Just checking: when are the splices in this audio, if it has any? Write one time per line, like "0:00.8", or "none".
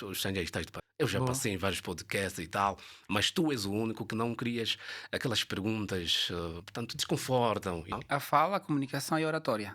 0:07.9